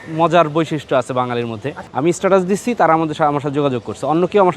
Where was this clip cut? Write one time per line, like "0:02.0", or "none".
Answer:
0:01.7